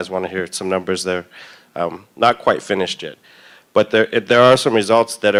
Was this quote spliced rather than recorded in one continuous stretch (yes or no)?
no